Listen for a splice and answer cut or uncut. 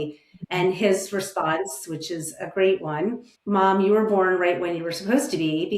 cut